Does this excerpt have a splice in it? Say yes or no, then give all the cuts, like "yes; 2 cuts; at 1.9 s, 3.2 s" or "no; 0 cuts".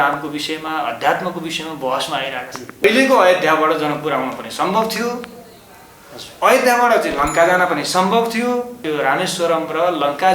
yes; 2 cuts; at 2.8 s, 8.8 s